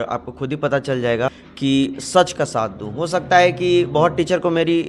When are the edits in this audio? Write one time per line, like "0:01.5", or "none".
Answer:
0:01.3